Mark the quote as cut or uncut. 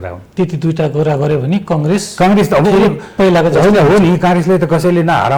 uncut